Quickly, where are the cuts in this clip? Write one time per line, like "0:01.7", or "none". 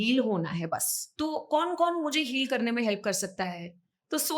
0:01.0